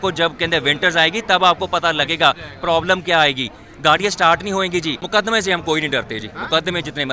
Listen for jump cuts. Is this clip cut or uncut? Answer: cut